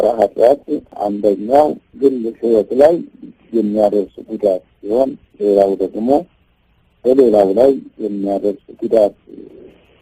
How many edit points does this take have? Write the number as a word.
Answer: two